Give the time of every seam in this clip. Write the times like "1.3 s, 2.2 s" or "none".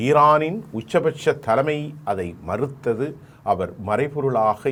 none

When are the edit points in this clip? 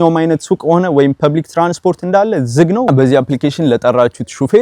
2.9 s

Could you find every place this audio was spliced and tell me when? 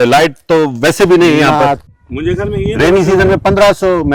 1.9 s

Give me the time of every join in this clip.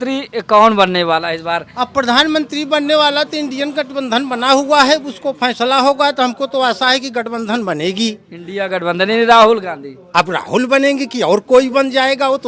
none

